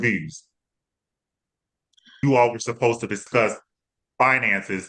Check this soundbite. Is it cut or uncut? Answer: cut